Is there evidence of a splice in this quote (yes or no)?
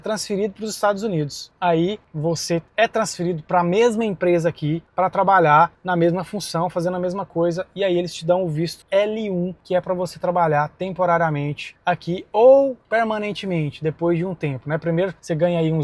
no